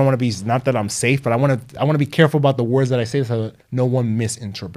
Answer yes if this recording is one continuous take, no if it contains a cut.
no